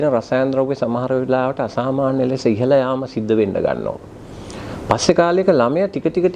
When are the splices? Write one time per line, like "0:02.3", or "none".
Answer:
none